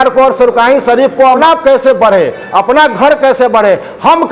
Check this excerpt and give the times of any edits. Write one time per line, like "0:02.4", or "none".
0:01.4